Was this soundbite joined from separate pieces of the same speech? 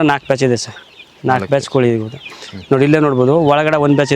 no; 0 cuts

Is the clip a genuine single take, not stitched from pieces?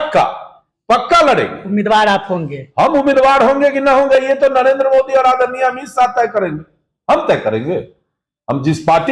yes; 0 cuts

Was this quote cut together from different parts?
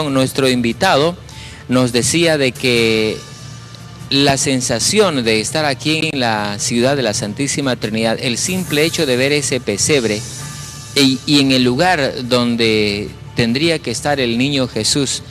no; 0 cuts

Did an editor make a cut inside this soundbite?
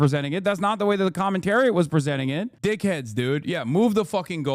no; 0 cuts

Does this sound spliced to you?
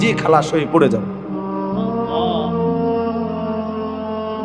yes; 2 cuts; at 1.0 s, 3.0 s

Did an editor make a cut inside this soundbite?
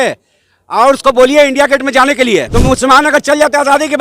yes; 1 cut; at 2.5 s

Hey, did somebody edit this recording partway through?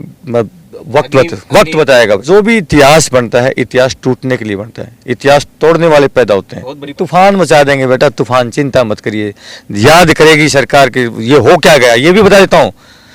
yes; 2 cuts; at 2.2 s, 6.9 s

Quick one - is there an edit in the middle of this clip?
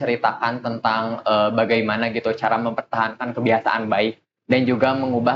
no; 0 cuts

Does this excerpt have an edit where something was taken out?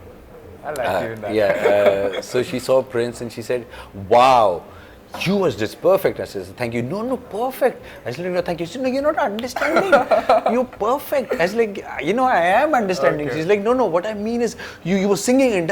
no; 0 cuts

